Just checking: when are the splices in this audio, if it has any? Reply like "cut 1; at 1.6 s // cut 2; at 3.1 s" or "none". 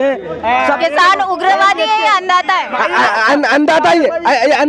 none